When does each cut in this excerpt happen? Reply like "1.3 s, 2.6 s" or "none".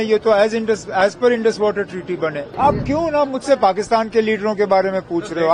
2.5 s

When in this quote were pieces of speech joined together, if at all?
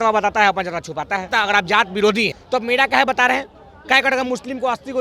1.3 s, 2.4 s

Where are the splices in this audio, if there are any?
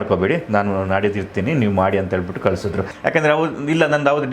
2.9 s

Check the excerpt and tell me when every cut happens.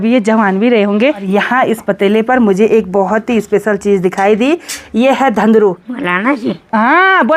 1.2 s, 5.9 s

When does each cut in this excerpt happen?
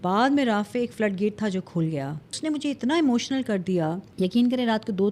2.3 s, 4.0 s

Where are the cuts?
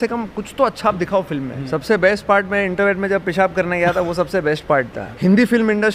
1.5 s, 5.0 s

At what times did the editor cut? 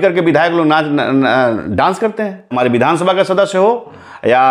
2.5 s

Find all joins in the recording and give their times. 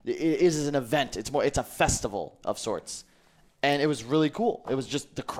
none

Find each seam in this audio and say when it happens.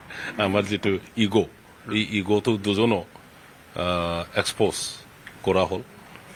none

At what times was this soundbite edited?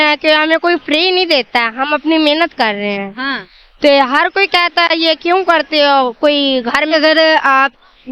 6.9 s

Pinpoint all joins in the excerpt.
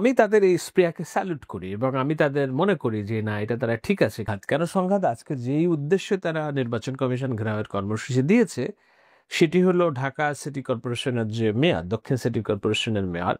4.3 s

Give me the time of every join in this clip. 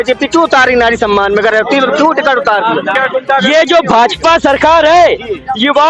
3.0 s

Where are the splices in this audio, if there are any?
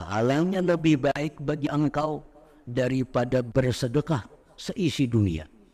none

